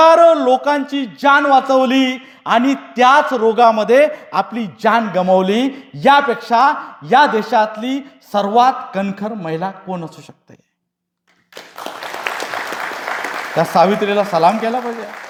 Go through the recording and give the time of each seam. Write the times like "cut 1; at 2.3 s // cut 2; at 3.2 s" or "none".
none